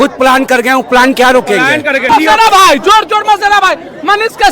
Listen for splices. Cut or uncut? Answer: cut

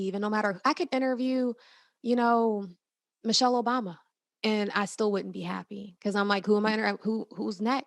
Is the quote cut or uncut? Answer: uncut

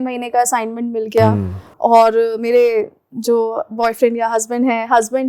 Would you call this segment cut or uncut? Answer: uncut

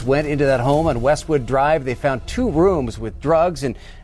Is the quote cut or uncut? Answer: uncut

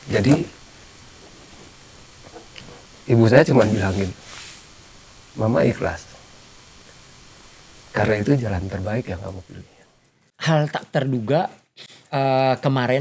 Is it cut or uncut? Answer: cut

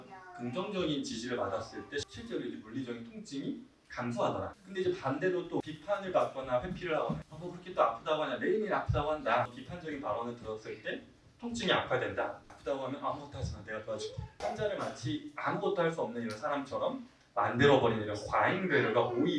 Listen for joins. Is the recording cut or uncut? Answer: cut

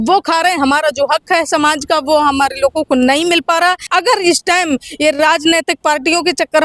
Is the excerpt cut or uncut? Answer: cut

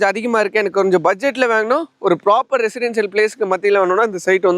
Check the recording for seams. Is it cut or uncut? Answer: uncut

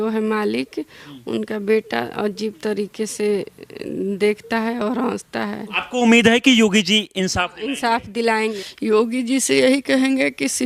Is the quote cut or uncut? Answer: cut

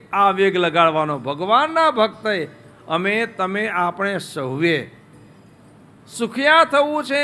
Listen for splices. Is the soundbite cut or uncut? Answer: uncut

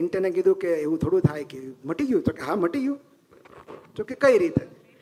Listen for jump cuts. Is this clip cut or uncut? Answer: uncut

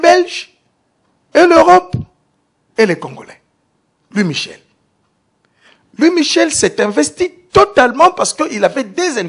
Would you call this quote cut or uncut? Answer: uncut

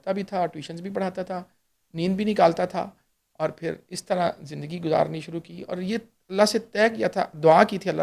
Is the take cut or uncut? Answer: uncut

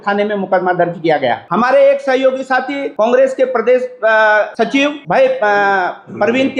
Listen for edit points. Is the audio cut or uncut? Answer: cut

